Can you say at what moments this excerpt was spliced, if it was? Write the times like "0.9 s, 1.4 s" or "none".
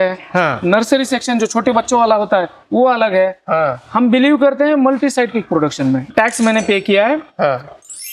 6.0 s